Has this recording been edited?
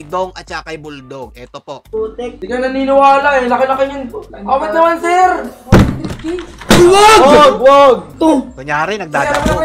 no; 0 cuts

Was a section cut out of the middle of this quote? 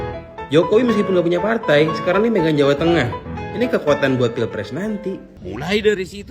yes; 1 cut; at 5.3 s

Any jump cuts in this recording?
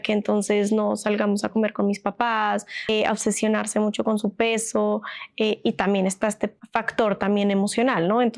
yes; 2 cuts; at 2.7 s, 6.6 s

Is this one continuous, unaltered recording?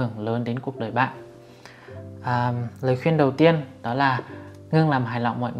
yes; 0 cuts

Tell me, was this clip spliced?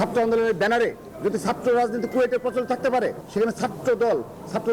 yes; 1 cut; at 3.2 s

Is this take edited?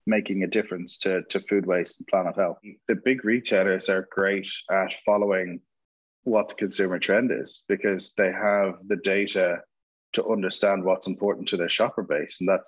yes; 1 cut; at 2.8 s

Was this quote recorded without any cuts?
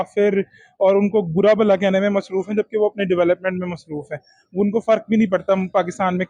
yes; 0 cuts

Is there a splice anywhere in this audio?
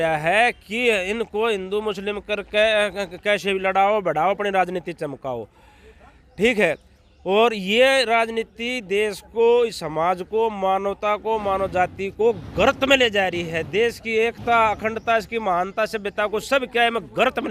no; 0 cuts

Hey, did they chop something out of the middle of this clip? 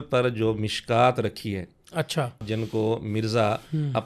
yes; 1 cut; at 2.4 s

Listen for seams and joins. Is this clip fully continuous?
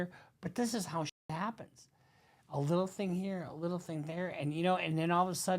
yes; 0 cuts

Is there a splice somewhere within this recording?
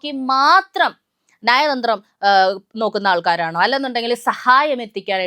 no; 0 cuts

